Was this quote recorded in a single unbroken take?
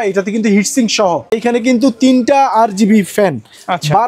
no; 1 cut; at 1.3 s

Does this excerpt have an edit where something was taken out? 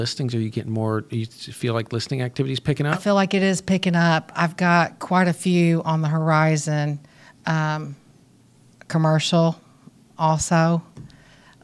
no; 0 cuts

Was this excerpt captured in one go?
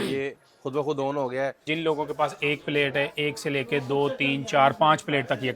no; 1 cut; at 1.6 s

